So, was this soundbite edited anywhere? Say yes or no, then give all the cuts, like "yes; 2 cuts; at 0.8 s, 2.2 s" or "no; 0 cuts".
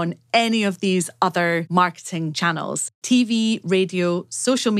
yes; 1 cut; at 1.8 s